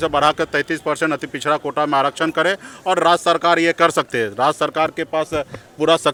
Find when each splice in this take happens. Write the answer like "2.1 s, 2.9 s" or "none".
none